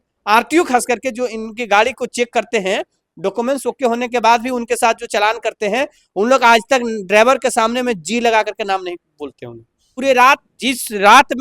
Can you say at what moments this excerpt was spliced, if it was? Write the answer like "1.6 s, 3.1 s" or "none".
9.9 s